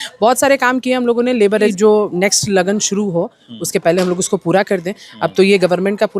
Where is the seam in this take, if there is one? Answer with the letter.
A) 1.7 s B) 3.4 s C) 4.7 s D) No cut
A